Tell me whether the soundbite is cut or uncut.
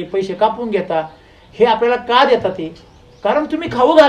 uncut